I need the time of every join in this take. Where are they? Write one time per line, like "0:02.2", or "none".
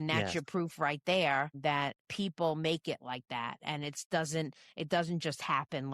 0:01.5